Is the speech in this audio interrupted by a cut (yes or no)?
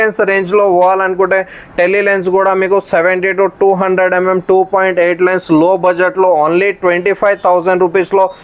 no